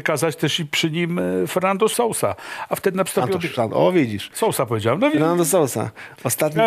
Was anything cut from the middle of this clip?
yes; 1 cut; at 1.9 s

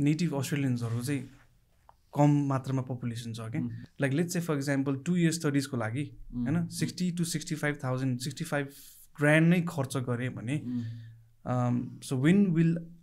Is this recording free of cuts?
no; 1 cut; at 3.8 s

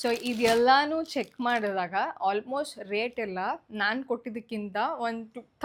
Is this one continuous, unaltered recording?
yes; 0 cuts

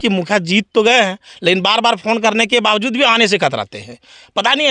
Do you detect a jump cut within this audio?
no; 0 cuts

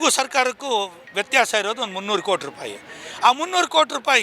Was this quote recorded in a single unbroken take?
yes; 0 cuts

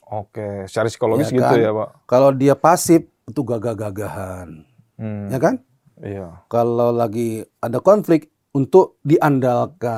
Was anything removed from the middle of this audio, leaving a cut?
no; 0 cuts

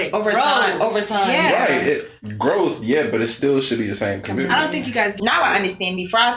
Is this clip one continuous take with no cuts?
no; 1 cut; at 5.2 s

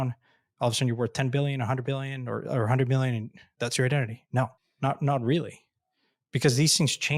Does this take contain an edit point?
yes; 1 cut; at 4.6 s

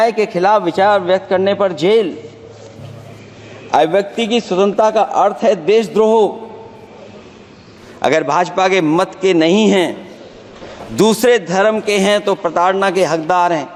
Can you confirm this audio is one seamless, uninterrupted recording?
yes; 0 cuts

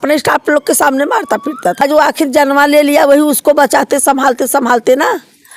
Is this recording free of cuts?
no; 1 cut; at 1.8 s

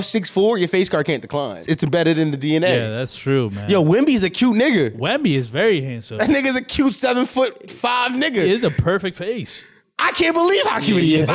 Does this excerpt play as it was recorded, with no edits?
no; 1 cut; at 1.6 s

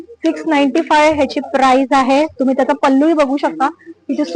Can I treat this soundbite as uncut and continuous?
yes; 0 cuts

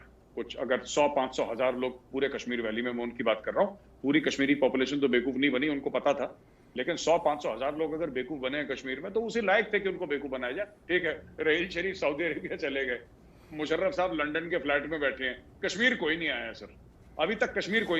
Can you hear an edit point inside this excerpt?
yes; 1 cut; at 10.8 s

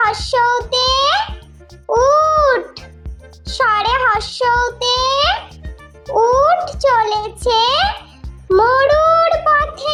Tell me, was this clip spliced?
no; 0 cuts

